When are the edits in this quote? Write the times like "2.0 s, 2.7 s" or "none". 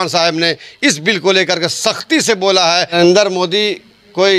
2.9 s

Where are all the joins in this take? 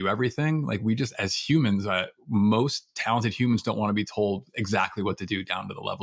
none

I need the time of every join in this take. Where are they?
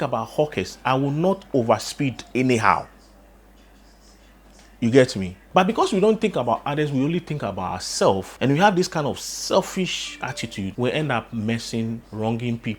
5.5 s

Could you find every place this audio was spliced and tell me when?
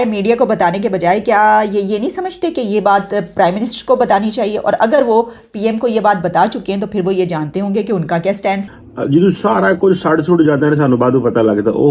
8.7 s

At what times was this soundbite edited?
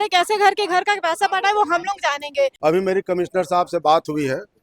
2.6 s

